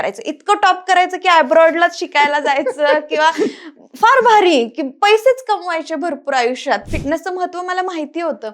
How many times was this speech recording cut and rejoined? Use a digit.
1